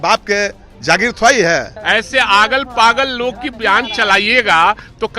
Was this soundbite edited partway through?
yes; 1 cut; at 1.7 s

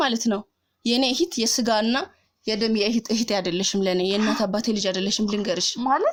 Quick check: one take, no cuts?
yes; 0 cuts

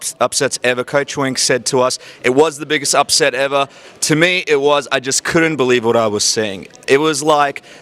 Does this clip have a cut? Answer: yes; 1 cut; at 6.3 s

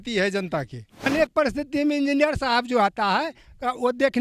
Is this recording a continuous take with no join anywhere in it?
no; 1 cut; at 1.1 s

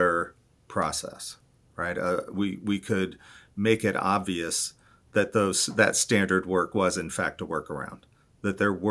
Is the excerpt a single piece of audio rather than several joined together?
yes; 0 cuts

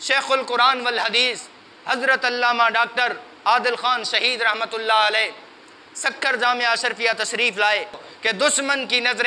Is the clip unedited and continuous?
no; 1 cut; at 8.1 s

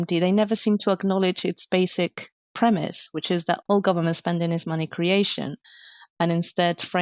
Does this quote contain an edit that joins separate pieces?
no; 0 cuts

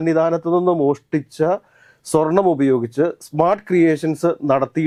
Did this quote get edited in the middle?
no; 0 cuts

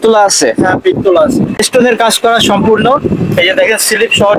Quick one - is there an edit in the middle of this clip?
yes; 1 cut; at 1.6 s

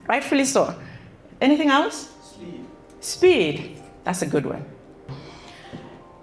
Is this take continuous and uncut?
no; 1 cut; at 5.1 s

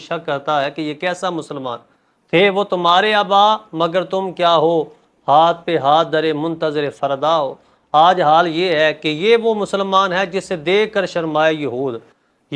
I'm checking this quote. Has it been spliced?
no; 0 cuts

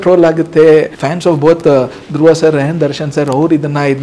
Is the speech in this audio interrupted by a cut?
yes; 1 cut; at 1.0 s

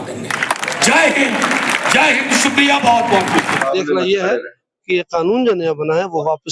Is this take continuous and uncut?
no; 1 cut; at 3.6 s

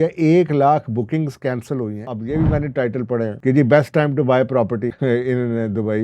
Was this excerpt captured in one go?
no; 3 cuts; at 2.1 s, 3.4 s, 4.9 s

